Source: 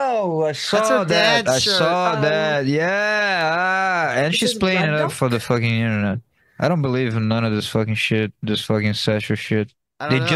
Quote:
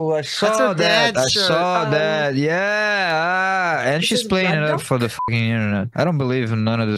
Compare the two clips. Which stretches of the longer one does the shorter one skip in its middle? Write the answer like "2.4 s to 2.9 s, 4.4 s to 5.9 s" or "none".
6.2 s to 6.5 s